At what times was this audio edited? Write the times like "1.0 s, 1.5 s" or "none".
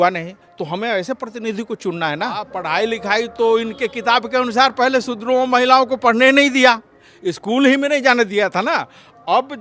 2.5 s